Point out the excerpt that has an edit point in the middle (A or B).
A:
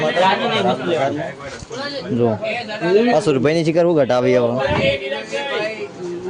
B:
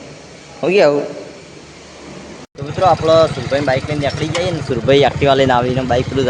B